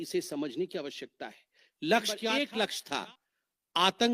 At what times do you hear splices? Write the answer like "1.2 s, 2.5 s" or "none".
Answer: 2.3 s

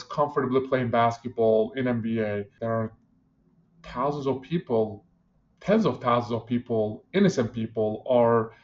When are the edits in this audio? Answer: 2.5 s

